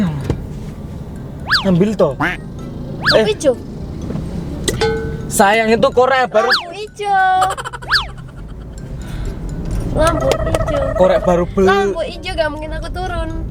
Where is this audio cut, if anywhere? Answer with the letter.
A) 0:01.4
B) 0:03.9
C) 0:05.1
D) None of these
D